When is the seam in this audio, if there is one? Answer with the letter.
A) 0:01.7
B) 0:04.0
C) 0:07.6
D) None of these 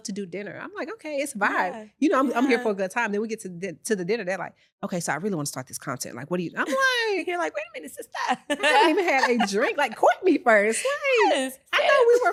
D